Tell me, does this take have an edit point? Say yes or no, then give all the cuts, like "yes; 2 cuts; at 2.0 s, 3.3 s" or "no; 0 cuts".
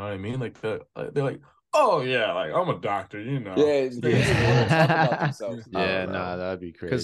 yes; 1 cut; at 5.5 s